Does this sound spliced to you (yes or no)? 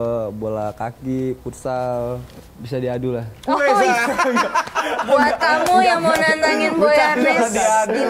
yes